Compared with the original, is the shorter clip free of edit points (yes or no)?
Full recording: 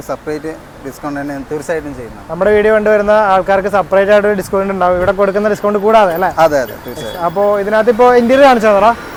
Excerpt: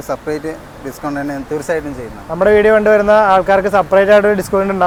yes